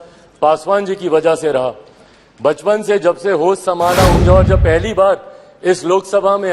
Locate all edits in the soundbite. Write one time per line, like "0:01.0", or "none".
0:04.2